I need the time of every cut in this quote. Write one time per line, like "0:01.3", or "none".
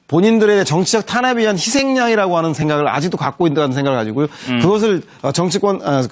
0:03.4